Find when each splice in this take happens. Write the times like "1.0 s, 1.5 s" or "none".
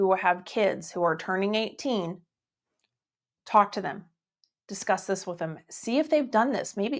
none